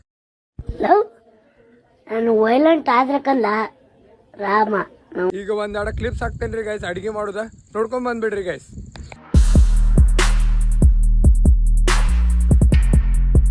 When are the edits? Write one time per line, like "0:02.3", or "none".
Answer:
0:05.3